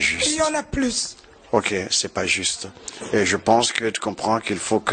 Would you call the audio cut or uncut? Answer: uncut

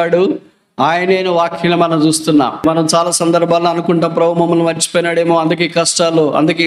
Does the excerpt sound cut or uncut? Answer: cut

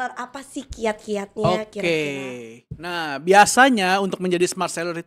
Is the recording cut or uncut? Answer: uncut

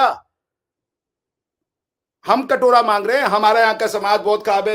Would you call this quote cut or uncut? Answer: uncut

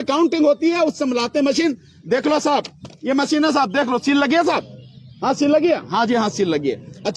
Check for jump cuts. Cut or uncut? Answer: uncut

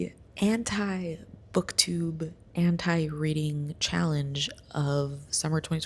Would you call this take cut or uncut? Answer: uncut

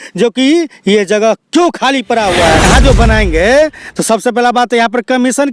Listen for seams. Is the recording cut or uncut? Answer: cut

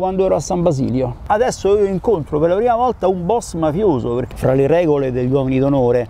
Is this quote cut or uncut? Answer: cut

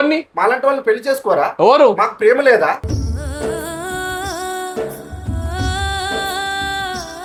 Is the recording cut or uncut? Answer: uncut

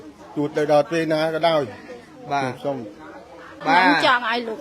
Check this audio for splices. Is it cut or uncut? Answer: cut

